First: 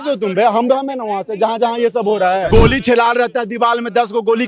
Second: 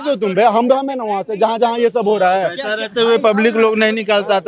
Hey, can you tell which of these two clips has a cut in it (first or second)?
first